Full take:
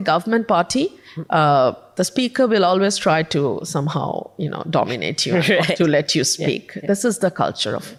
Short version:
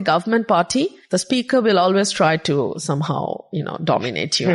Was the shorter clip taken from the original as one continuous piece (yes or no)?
no